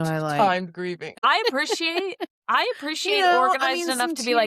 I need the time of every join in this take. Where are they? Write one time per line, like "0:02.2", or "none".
0:01.1